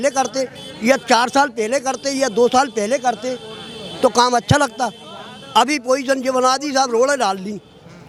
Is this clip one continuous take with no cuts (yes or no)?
yes